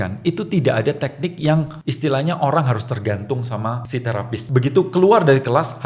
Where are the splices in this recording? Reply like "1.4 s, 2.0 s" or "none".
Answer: 1.8 s, 4.2 s